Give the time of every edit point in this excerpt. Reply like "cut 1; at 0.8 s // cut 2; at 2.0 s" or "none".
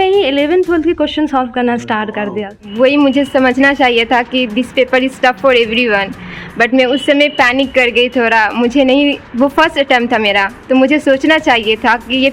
cut 1; at 2.6 s